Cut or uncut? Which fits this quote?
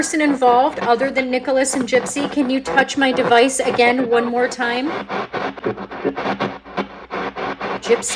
cut